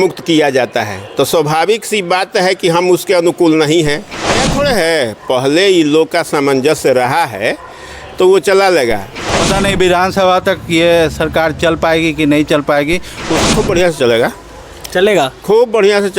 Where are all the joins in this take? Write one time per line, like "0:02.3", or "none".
0:04.4
0:09.2
0:13.5